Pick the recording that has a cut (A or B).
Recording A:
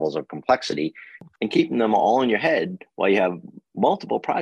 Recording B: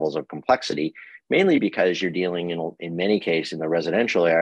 A